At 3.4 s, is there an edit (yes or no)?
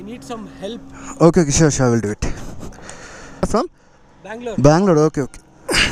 yes